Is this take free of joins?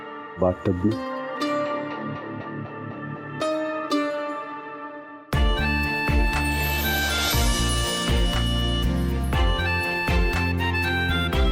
yes; 0 cuts

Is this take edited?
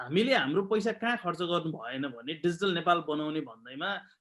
no; 0 cuts

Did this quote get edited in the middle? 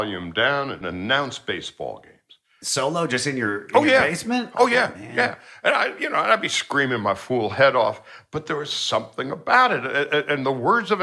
yes; 2 cuts; at 0.8 s, 2.5 s

